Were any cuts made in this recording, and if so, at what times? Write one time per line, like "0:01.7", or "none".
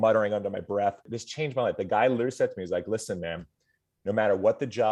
0:01.2